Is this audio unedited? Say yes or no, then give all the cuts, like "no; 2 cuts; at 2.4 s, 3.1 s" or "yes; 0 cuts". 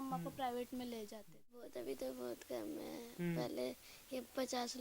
no; 1 cut; at 1.7 s